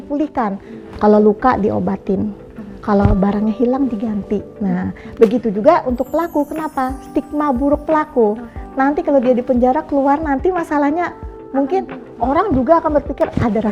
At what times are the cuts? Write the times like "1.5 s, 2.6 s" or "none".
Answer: none